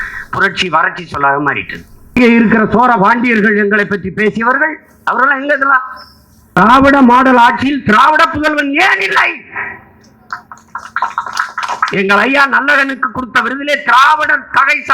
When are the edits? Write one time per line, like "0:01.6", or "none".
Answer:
0:02.1
0:06.6